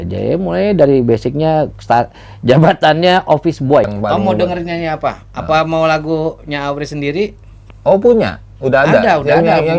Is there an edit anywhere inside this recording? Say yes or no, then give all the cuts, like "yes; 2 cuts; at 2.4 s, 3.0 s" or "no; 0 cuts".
yes; 1 cut; at 3.9 s